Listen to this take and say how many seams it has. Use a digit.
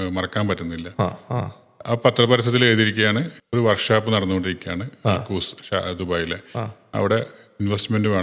0